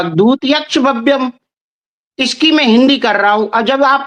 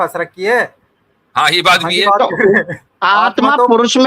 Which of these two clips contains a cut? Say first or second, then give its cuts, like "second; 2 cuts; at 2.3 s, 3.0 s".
second; 1 cut; at 2.8 s